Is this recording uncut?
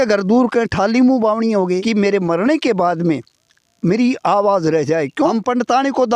no; 2 cuts; at 1.8 s, 5.3 s

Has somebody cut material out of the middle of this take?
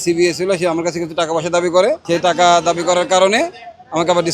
yes; 1 cut; at 2.0 s

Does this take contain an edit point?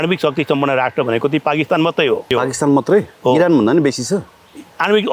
yes; 1 cut; at 2.3 s

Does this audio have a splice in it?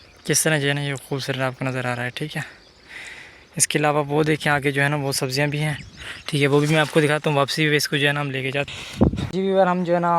no; 0 cuts

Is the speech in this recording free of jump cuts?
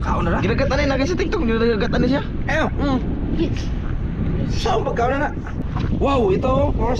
no; 1 cut; at 5.5 s

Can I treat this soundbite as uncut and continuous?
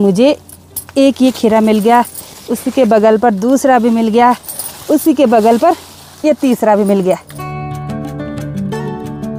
yes; 0 cuts

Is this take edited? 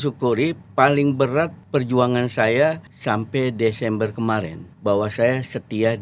yes; 3 cuts; at 1.6 s, 2.9 s, 4.6 s

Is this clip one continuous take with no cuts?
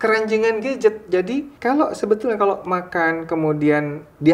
no; 1 cut; at 1.5 s

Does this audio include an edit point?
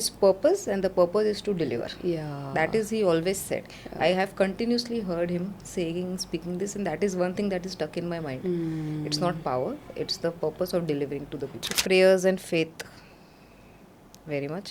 yes; 1 cut; at 11.6 s

